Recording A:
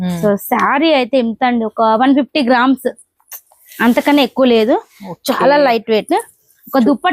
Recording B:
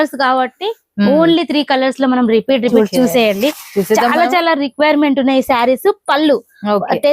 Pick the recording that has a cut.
B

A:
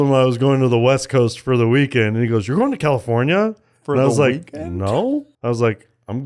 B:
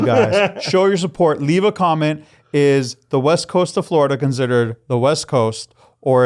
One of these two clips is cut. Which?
A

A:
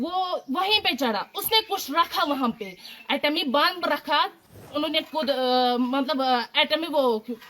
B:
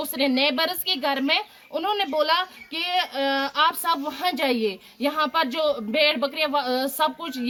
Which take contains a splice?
A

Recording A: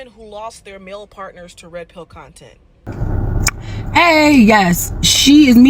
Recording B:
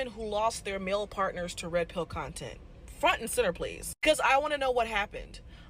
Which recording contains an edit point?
A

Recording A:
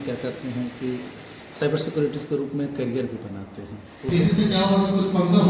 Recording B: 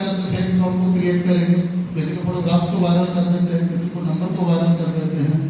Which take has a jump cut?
A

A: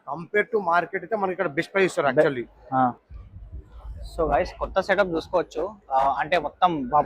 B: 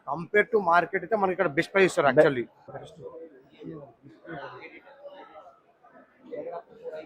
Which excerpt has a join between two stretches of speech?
A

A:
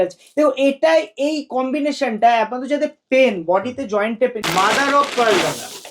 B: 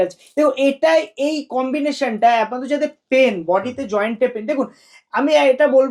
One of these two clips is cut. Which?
A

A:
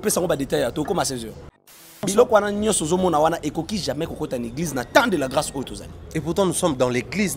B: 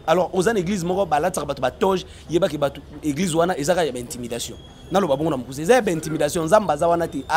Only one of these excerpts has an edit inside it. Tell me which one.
A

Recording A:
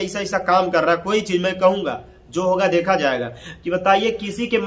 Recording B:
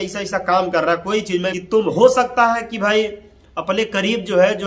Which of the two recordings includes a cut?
B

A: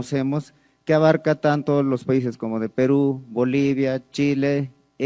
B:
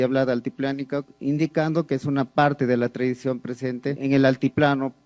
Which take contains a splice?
B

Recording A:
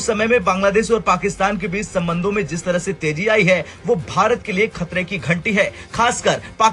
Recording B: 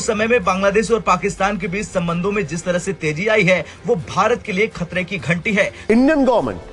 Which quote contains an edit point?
B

